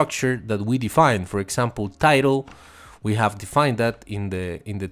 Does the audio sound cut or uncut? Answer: uncut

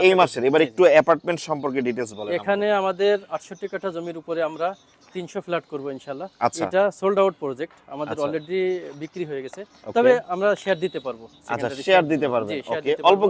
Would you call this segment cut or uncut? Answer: uncut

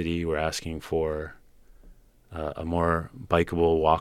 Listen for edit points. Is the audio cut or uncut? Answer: uncut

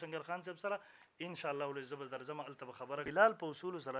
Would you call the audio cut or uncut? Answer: cut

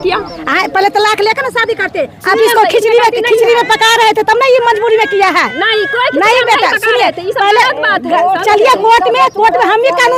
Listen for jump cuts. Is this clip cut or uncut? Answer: uncut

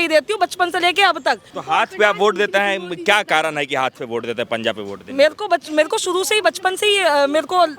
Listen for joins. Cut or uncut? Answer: cut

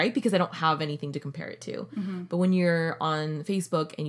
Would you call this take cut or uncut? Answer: uncut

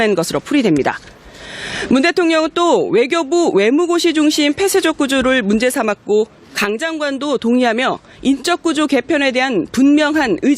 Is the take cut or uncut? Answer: cut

